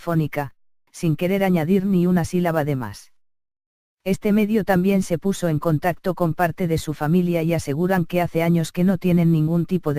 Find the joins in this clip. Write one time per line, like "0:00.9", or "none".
none